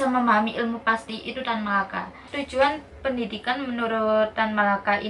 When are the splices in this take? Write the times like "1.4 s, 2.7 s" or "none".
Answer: 2.3 s